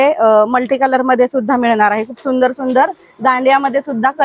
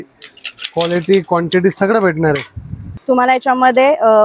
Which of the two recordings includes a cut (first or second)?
second